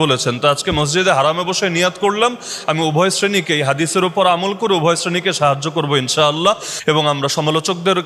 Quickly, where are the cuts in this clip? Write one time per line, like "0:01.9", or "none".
0:06.7